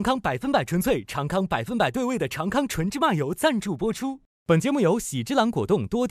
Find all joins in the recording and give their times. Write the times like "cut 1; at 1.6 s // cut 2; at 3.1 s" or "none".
none